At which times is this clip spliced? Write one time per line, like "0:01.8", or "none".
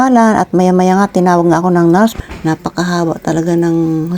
0:02.2